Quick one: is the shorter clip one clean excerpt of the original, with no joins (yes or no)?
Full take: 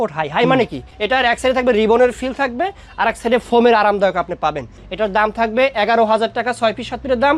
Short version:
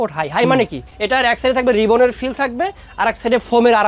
yes